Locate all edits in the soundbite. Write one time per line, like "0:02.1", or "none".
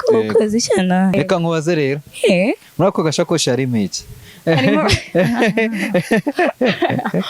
0:01.1